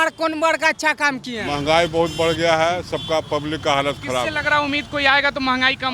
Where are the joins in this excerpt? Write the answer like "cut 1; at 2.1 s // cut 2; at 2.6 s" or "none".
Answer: cut 1; at 1.4 s